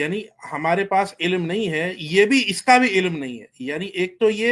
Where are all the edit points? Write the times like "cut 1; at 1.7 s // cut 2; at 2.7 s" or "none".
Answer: none

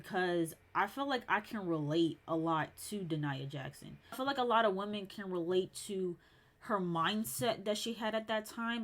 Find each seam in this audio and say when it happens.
cut 1; at 4.2 s

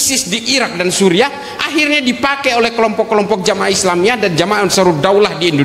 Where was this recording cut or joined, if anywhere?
none

